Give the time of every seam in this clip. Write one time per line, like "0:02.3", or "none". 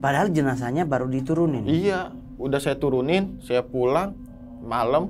none